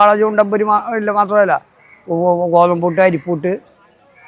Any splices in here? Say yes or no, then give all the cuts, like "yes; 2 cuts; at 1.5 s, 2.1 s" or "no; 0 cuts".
no; 0 cuts